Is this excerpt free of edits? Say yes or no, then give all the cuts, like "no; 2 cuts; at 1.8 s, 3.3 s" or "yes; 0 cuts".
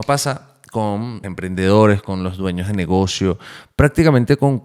no; 1 cut; at 1.2 s